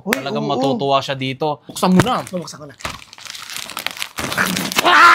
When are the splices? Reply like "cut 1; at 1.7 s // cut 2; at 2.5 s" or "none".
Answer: cut 1; at 1.7 s